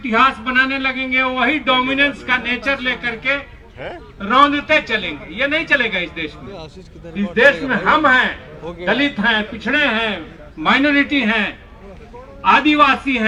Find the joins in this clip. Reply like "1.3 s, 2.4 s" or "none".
none

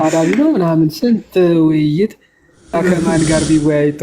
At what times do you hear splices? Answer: 2.8 s

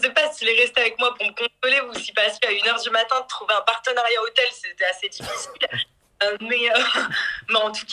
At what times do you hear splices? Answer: none

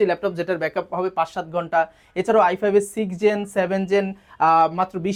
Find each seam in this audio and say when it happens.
none

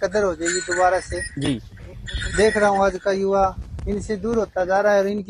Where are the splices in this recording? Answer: none

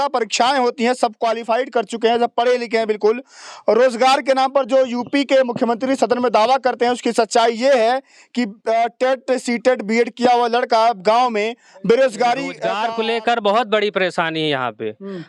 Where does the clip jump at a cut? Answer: 12.8 s

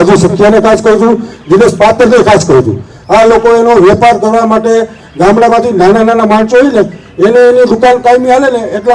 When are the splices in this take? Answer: none

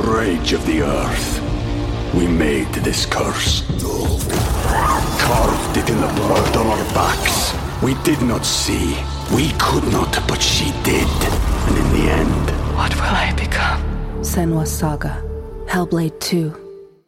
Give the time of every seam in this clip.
none

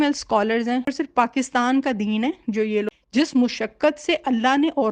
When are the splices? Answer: 0.9 s, 2.9 s

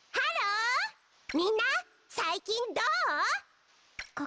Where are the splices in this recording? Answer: none

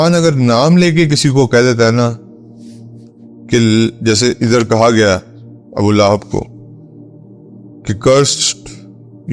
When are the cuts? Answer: 6.5 s, 7.8 s

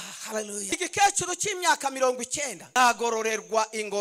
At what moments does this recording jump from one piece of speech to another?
0.7 s, 2.8 s

